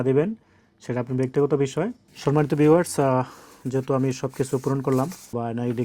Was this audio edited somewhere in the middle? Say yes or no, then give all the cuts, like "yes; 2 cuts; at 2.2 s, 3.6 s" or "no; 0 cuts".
yes; 1 cut; at 2.1 s